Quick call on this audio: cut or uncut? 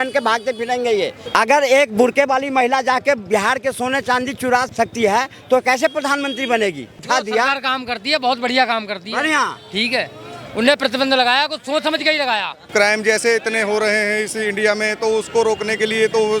cut